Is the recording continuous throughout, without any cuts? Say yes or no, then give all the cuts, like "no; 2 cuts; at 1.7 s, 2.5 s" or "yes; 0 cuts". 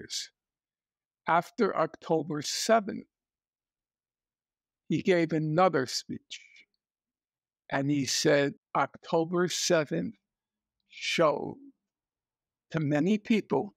no; 1 cut; at 8.6 s